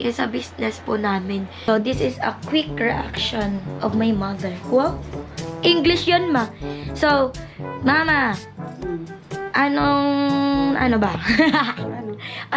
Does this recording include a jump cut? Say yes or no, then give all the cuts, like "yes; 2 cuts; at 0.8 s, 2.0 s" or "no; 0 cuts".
yes; 1 cut; at 1.7 s